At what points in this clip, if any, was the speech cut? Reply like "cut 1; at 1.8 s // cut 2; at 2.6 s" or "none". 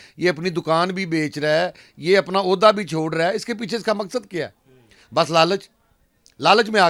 none